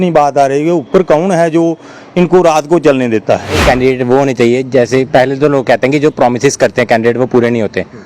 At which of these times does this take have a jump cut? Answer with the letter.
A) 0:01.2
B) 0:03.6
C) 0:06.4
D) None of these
B